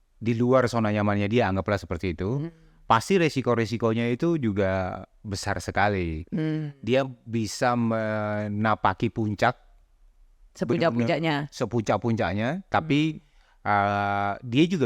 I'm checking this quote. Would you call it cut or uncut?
uncut